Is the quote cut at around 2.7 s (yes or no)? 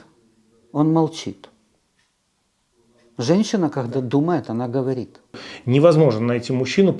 no